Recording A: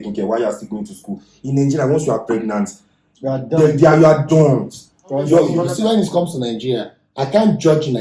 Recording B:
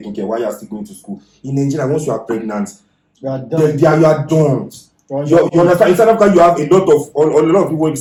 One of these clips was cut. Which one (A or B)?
A